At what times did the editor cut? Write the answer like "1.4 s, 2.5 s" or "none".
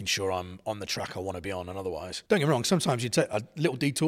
2.1 s